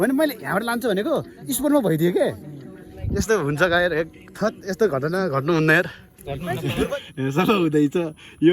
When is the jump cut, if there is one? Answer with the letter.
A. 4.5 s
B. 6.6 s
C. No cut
B